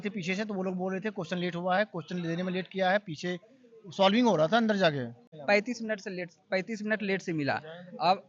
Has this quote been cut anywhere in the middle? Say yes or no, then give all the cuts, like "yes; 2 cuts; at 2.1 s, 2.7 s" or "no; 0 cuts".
yes; 1 cut; at 5.3 s